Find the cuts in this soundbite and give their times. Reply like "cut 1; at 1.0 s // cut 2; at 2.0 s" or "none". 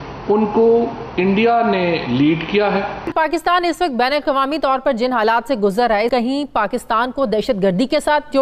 cut 1; at 3.1 s // cut 2; at 6.1 s